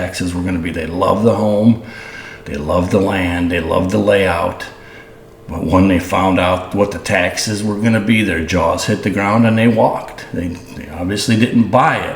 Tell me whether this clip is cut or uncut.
uncut